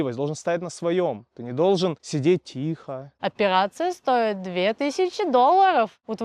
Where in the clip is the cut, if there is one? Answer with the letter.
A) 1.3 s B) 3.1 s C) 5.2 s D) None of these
B